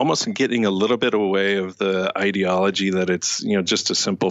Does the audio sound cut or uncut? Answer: uncut